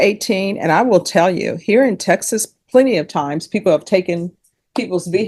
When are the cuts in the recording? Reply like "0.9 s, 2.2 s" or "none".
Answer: none